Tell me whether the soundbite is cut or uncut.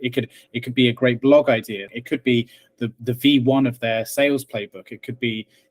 cut